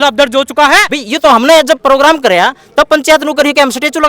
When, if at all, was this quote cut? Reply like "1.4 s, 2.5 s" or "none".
0.9 s